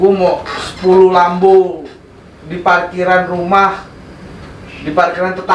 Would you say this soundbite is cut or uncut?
uncut